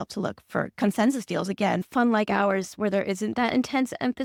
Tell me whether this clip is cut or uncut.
uncut